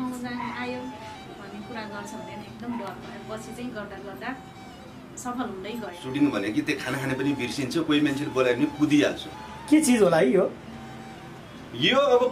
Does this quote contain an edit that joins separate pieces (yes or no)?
yes